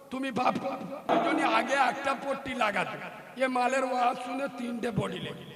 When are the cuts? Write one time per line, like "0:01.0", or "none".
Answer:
0:01.1